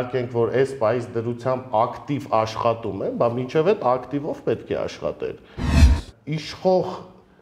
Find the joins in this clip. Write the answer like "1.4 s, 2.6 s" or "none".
5.8 s